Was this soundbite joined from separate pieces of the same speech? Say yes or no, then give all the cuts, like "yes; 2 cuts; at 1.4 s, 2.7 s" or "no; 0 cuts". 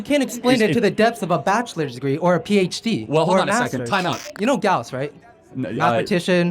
yes; 1 cut; at 4.3 s